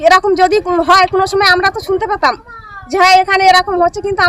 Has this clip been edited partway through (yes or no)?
no